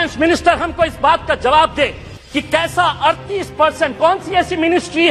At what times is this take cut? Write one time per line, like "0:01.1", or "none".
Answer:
none